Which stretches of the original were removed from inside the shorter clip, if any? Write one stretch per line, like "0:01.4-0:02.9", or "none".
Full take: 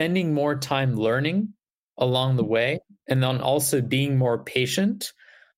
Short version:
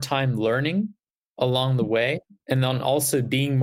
none

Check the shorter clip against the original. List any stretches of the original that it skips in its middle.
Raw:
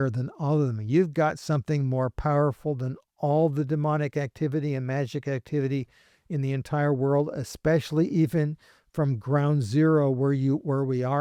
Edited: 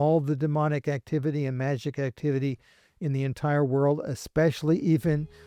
none

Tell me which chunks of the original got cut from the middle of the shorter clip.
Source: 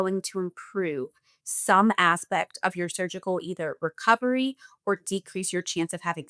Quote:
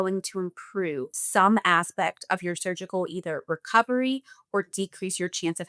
0:01.2-0:01.5

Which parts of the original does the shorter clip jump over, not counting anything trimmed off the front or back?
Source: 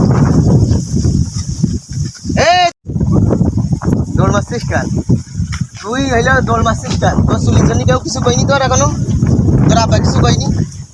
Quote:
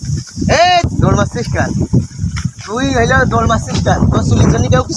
0:02.8-0:04.1

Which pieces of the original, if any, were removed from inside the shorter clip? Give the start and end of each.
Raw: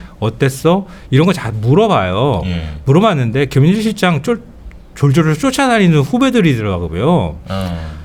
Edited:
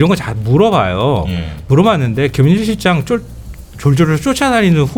none

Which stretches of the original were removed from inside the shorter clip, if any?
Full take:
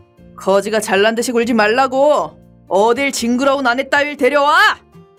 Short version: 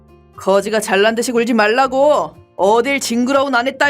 0:02.4-0:02.5

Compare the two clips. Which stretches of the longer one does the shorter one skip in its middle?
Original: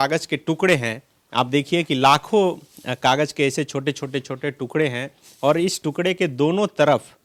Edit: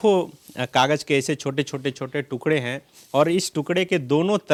none

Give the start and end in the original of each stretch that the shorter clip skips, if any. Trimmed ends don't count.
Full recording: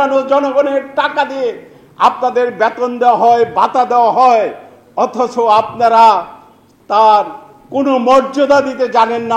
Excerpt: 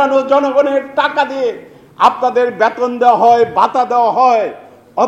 none

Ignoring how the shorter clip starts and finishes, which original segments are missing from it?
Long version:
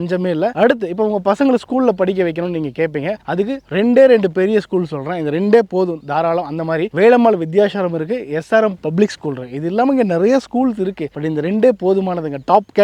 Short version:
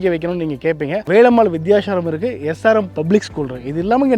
0:03.2-0:06.9

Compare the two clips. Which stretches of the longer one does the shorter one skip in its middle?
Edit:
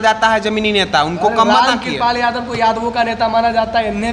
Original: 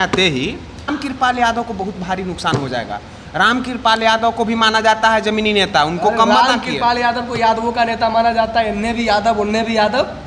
none

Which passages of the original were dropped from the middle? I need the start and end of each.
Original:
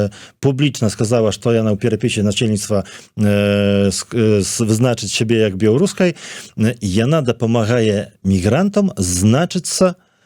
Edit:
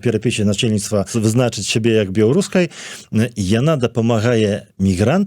0:02.9-0:04.6

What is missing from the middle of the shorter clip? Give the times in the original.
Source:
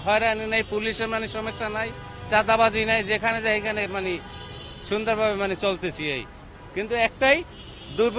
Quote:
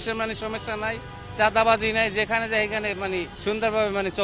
0:04.3-0:04.8

